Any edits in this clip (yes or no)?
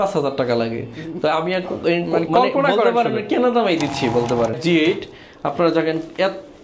yes